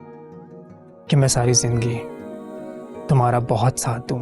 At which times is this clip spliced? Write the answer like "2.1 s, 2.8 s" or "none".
1.1 s